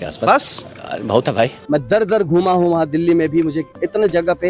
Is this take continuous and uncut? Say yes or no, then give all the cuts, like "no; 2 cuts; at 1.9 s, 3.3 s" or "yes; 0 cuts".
no; 1 cut; at 1.6 s